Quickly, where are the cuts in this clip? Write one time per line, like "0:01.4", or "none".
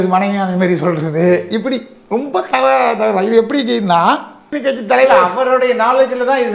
0:04.4